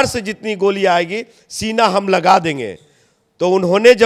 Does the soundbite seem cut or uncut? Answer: uncut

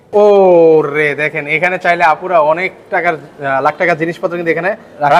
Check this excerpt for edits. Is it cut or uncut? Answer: uncut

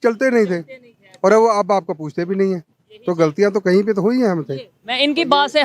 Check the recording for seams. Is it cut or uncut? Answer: uncut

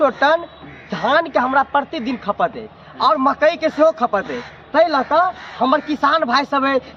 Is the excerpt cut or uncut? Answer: uncut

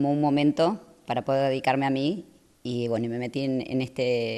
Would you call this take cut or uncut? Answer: uncut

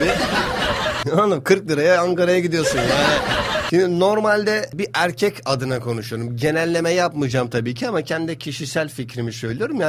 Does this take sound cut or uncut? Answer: uncut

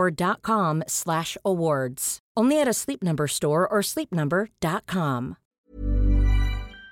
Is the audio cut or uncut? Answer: cut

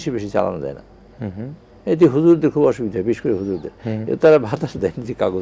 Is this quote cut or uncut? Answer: uncut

